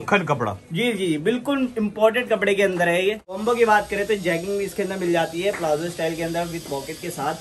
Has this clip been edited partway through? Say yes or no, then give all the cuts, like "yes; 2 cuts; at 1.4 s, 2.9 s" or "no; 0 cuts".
yes; 1 cut; at 3.4 s